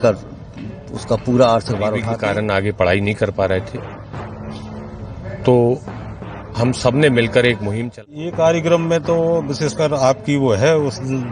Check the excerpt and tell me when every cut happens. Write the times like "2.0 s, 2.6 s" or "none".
2.1 s, 8.0 s